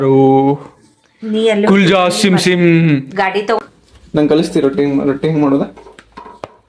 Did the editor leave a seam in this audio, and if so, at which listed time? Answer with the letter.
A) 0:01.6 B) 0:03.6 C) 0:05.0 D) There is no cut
B